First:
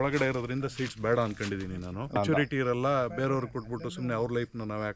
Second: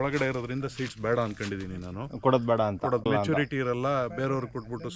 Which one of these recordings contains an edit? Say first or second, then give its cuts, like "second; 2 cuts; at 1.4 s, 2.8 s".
first; 1 cut; at 2.2 s